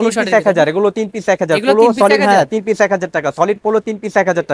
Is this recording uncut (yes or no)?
yes